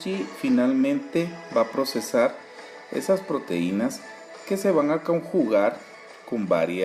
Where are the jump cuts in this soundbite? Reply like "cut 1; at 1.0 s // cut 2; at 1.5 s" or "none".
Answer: cut 1; at 2.2 s